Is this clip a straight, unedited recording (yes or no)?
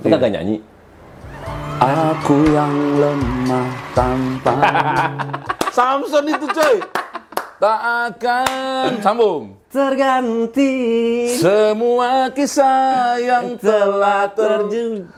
yes